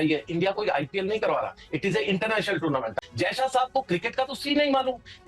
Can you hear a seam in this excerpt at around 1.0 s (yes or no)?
no